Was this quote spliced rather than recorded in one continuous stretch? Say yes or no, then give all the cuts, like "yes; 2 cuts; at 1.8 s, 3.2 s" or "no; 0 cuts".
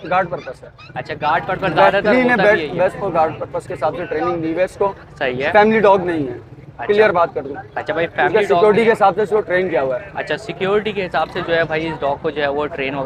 no; 0 cuts